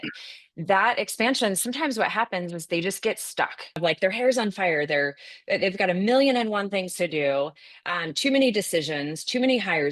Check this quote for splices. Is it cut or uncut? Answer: cut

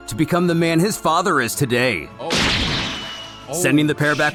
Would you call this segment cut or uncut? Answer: uncut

